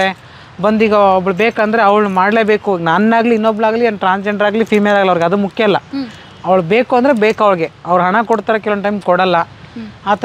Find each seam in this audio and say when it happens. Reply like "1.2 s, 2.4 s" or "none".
none